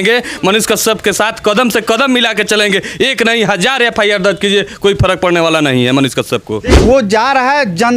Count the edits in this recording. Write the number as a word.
one